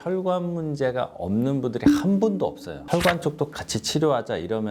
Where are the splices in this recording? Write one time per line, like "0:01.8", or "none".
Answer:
0:02.8